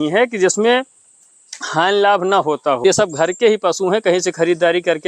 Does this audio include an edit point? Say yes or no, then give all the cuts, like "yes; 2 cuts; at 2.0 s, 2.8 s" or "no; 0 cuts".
yes; 1 cut; at 2.8 s